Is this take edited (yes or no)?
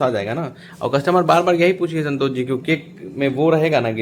no